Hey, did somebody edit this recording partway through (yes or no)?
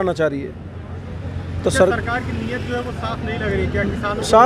no